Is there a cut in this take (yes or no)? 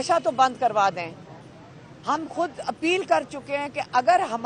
no